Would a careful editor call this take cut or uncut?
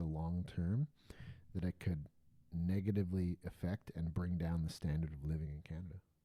uncut